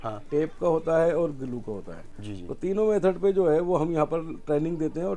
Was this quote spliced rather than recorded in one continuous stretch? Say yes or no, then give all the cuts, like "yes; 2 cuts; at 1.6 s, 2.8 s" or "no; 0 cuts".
no; 0 cuts